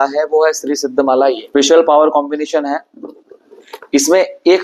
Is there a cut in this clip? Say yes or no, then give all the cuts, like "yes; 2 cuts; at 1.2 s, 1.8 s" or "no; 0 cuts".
yes; 1 cut; at 1.4 s